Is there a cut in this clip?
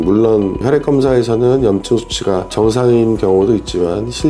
no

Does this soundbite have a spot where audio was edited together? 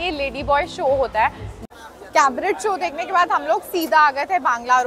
yes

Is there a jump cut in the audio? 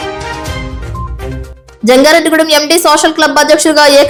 no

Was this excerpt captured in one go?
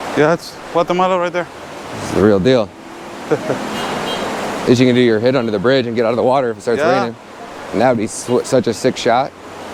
yes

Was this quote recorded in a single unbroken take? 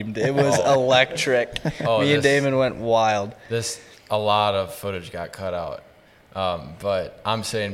yes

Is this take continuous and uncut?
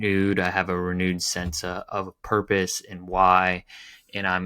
no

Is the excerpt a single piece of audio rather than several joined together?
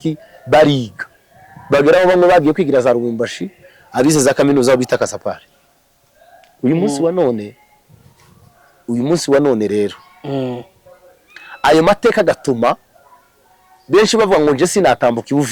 yes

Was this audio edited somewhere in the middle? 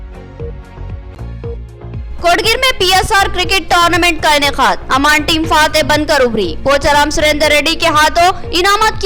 yes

